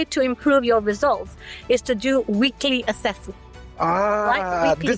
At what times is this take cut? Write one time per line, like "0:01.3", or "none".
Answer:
none